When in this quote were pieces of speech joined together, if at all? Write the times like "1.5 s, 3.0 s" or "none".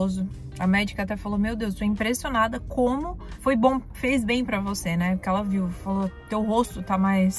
none

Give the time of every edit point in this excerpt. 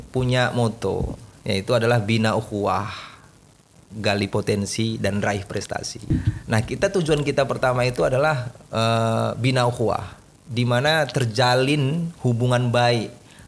1.3 s, 6.1 s

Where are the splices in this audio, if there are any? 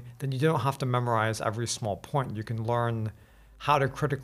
none

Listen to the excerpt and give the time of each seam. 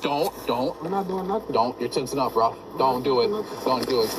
none

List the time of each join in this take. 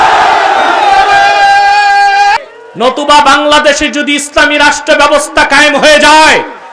2.4 s

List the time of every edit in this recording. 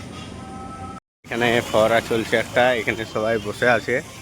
1.1 s

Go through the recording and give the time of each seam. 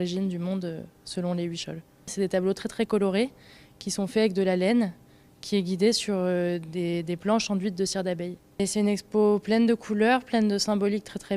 7.0 s

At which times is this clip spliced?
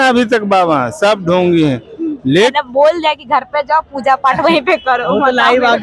2.5 s

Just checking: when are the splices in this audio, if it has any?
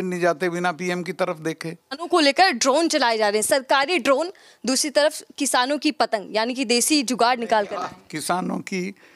2.0 s

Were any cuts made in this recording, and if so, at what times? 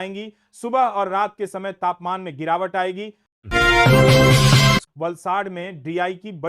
3.5 s, 4.9 s

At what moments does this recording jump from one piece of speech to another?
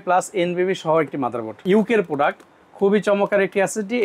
1.6 s

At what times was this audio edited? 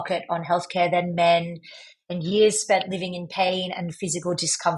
none

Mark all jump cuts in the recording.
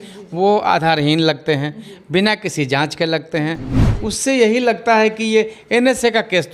3.7 s

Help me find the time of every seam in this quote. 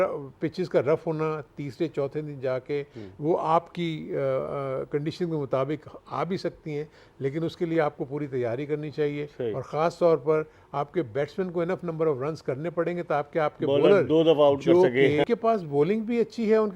15.2 s

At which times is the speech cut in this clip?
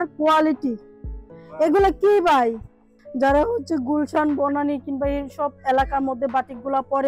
3.0 s

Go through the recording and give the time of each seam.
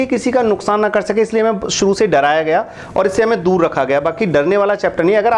none

